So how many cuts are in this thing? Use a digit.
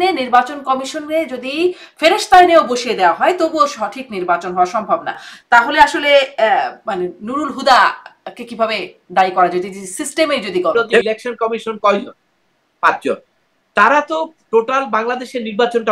2